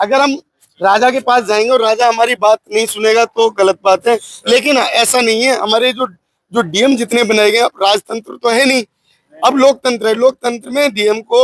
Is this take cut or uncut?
uncut